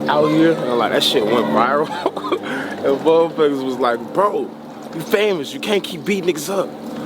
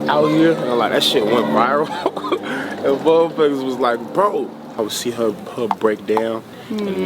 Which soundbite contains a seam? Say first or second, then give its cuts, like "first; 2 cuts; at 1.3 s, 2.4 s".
second; 1 cut; at 4.8 s